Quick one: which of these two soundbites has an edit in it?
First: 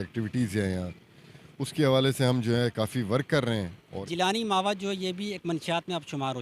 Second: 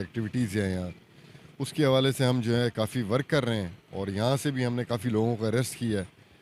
first; 1 cut; at 4.0 s

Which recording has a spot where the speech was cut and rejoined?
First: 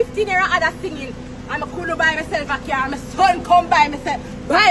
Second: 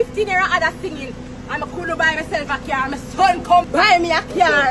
second; 1 cut; at 3.7 s

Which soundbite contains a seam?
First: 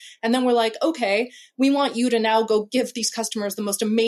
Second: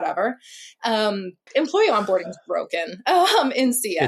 second; 1 cut; at 1.5 s

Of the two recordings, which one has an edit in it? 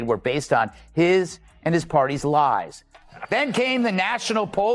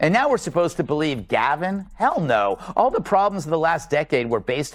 first; 1 cut; at 3.1 s

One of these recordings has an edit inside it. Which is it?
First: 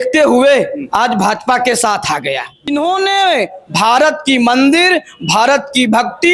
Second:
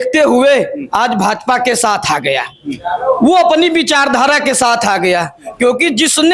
first; 1 cut; at 2.7 s

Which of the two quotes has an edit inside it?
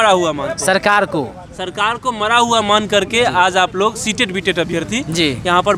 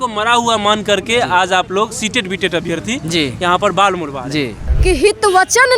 second; 1 cut; at 4.6 s

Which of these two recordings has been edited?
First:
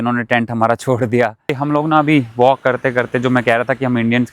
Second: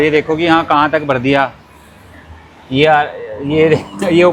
first; 1 cut; at 1.4 s

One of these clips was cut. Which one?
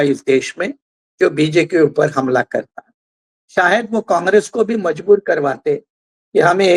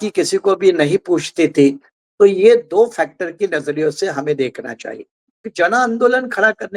second; 1 cut; at 5.4 s

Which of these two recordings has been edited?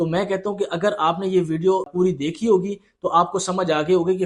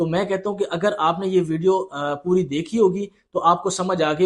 first; 1 cut; at 1.9 s

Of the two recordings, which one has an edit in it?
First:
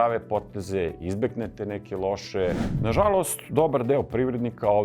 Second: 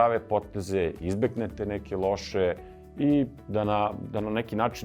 first; 1 cut; at 2.7 s

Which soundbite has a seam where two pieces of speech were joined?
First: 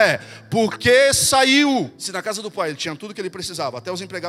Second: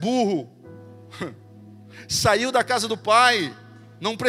first; 1 cut; at 2.0 s

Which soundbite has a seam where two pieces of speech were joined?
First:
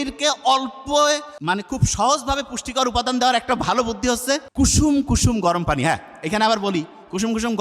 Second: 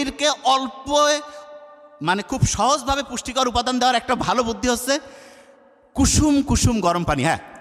first; 2 cuts; at 1.3 s, 4.5 s

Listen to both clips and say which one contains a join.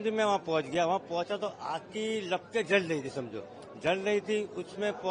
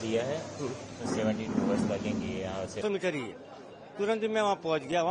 second; 1 cut; at 2.8 s

